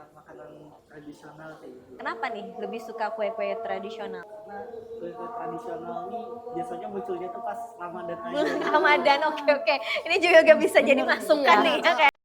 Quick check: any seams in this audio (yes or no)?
yes